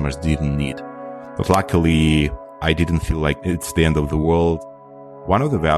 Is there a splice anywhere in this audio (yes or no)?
yes